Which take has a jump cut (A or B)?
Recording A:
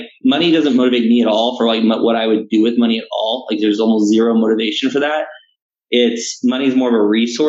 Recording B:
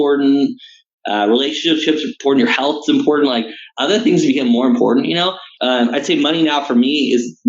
B